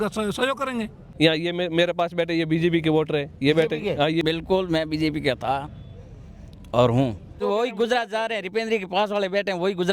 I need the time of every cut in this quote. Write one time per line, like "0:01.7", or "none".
0:01.0
0:04.2
0:07.4